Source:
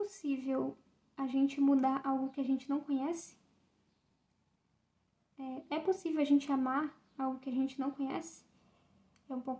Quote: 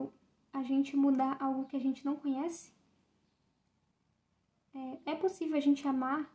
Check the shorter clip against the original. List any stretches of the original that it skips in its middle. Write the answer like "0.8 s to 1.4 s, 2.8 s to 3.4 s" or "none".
none